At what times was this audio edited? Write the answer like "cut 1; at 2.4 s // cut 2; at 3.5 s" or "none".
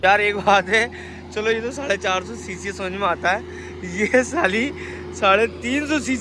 none